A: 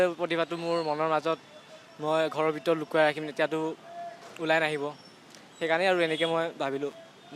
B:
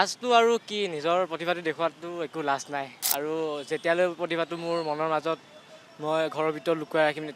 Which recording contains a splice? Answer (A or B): B